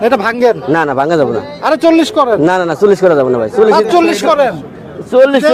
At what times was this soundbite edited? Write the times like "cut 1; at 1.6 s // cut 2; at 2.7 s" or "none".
none